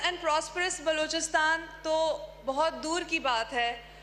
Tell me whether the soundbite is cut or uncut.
uncut